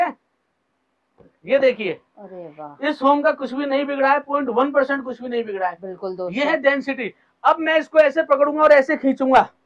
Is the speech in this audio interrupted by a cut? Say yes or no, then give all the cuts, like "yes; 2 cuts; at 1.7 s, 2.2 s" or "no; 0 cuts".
no; 0 cuts